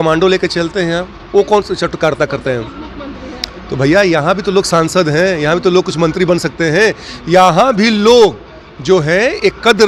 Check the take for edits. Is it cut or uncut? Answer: uncut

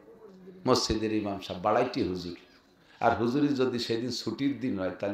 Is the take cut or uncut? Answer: uncut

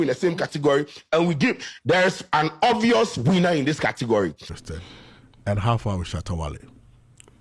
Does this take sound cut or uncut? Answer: cut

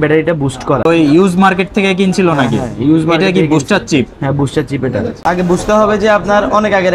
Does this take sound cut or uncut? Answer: cut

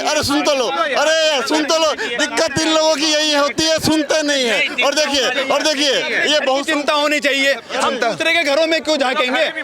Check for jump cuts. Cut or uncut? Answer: uncut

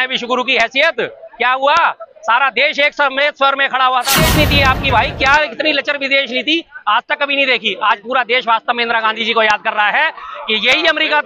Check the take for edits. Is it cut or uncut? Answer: cut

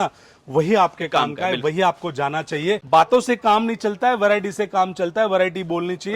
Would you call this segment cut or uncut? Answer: cut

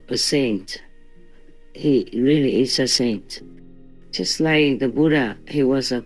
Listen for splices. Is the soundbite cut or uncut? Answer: cut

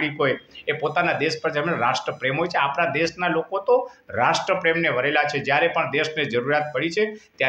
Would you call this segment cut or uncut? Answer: uncut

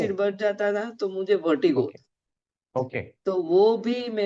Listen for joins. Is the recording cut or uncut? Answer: uncut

